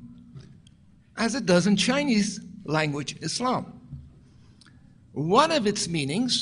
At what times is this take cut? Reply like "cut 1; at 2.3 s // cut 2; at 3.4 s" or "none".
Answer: cut 1; at 3.1 s